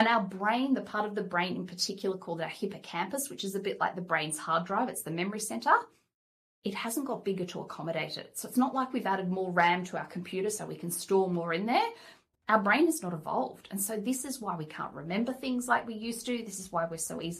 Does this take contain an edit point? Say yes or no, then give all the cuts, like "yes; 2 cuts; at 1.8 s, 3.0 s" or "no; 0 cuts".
no; 0 cuts